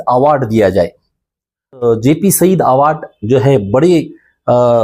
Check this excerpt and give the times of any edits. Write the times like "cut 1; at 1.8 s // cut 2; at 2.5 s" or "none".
cut 1; at 1.8 s